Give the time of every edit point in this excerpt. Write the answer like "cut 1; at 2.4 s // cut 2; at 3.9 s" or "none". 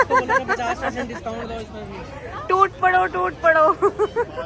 none